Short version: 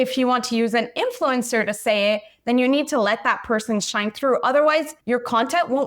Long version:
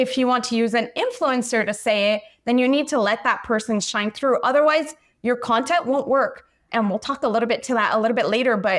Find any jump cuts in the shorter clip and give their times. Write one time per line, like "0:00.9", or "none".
0:05.0

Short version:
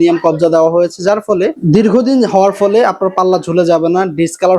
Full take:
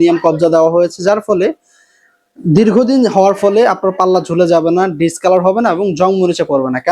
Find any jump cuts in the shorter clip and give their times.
0:01.6

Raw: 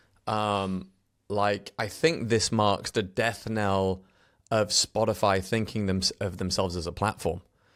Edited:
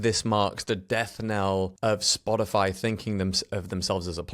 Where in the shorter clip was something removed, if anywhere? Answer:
0:01.7

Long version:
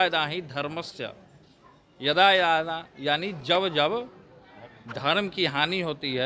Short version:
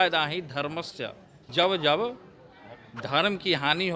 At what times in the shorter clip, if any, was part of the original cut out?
0:01.4

